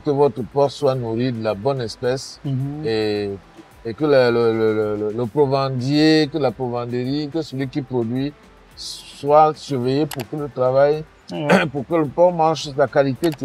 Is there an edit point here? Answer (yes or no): no